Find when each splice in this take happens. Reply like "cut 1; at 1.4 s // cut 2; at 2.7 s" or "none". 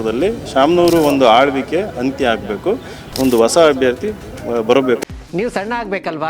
cut 1; at 5.0 s